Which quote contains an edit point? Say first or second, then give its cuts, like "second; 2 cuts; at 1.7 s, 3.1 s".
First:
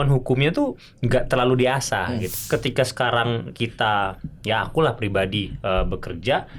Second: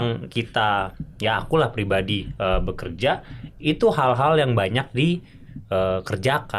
first; 1 cut; at 2.3 s